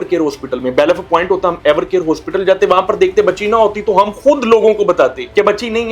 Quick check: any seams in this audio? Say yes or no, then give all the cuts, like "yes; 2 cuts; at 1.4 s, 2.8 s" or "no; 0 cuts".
no; 0 cuts